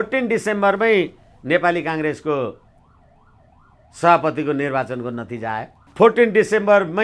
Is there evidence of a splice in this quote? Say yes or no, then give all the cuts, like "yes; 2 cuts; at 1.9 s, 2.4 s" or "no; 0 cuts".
yes; 1 cut; at 5.9 s